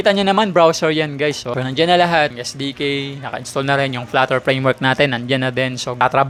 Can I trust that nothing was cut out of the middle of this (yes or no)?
yes